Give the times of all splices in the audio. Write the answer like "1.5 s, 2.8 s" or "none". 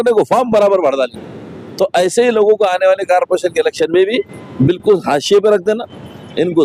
none